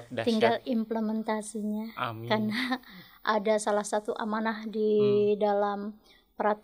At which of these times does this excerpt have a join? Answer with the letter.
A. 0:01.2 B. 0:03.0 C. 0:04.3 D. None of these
D